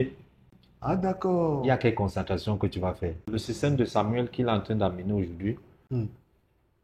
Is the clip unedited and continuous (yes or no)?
no